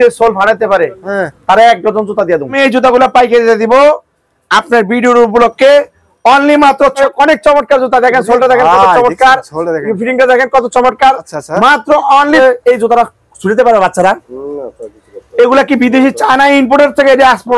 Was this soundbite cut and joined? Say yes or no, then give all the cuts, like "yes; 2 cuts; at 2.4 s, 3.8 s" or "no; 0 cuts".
yes; 3 cuts; at 2.5 s, 7.0 s, 12.4 s